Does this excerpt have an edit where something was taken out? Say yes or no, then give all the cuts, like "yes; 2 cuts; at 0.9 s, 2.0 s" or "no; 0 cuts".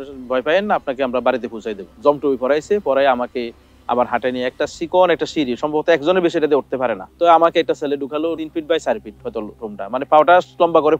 yes; 2 cuts; at 1.8 s, 7.0 s